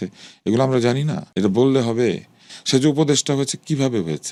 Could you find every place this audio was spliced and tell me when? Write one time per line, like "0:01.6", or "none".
none